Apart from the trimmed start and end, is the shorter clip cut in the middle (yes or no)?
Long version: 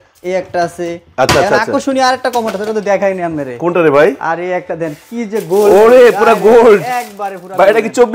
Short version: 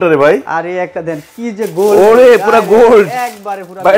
no